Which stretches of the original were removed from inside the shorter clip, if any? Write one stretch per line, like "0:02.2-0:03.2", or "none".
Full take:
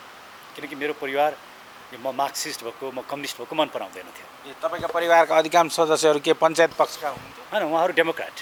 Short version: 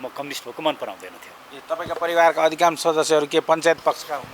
none